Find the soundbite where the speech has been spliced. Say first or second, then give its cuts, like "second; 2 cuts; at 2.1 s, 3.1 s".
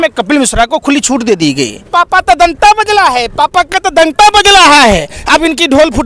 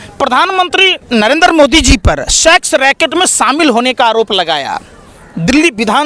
first; 1 cut; at 1.8 s